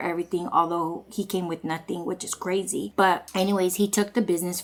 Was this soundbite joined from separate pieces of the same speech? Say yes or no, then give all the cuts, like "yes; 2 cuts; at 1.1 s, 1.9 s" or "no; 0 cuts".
no; 0 cuts